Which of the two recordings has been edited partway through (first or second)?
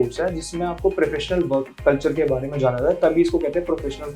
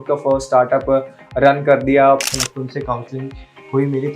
second